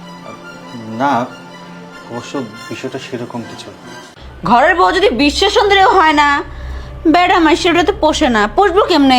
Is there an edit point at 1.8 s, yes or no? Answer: no